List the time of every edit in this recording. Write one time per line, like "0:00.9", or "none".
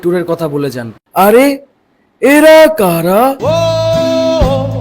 0:03.4

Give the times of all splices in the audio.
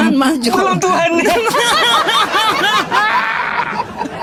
none

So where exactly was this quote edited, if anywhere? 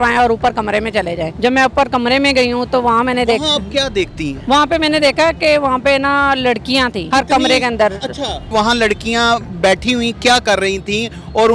0:01.3
0:04.3
0:07.0
0:08.5

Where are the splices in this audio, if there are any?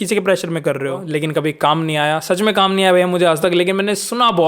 0:00.9

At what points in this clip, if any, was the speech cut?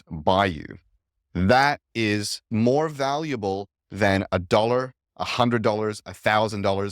0:02.5

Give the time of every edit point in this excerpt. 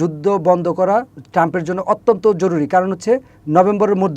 0:01.2

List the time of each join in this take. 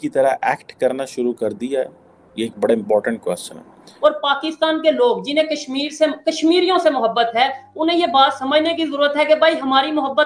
0:03.8

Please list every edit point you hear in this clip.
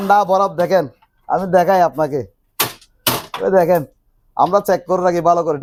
none

